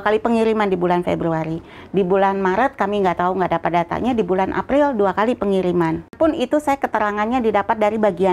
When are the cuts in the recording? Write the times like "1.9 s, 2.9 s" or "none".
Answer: 6.1 s

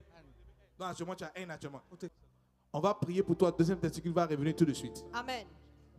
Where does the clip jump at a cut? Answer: 2.1 s

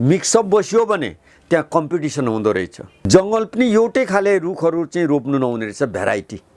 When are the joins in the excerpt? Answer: 3.1 s

